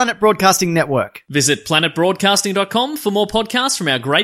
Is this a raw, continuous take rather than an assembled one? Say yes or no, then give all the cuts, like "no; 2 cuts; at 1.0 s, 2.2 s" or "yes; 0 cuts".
yes; 0 cuts